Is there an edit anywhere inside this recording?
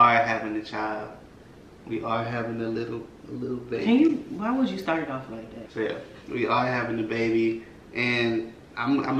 no; 0 cuts

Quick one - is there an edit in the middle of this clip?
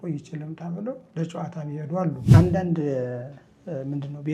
yes; 1 cut; at 2.2 s

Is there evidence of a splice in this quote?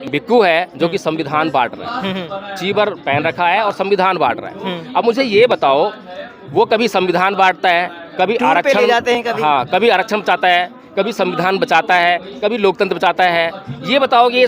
no; 0 cuts

